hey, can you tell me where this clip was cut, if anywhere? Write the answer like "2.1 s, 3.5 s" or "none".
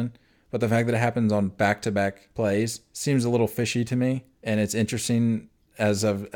2.2 s, 2.9 s, 4.3 s